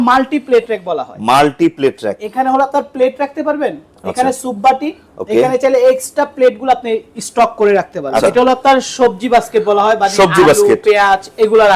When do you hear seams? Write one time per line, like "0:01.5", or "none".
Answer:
0:08.2